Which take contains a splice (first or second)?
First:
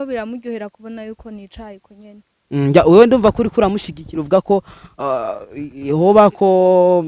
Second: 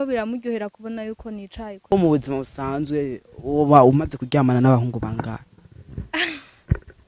second